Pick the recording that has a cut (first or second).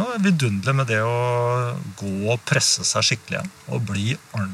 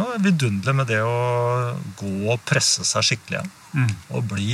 first